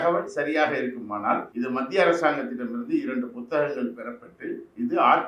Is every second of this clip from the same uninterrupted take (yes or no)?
no